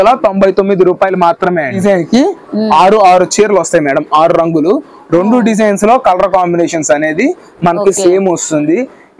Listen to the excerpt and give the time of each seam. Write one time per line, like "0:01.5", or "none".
0:01.8